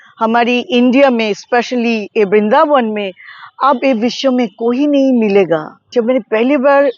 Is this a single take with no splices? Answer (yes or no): no